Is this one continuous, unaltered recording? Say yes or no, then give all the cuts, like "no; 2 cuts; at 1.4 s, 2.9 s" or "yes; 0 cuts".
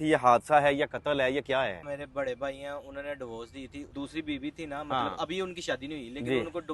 no; 2 cuts; at 1.8 s, 3.9 s